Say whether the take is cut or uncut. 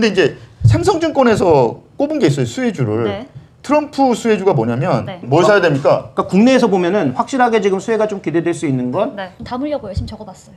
cut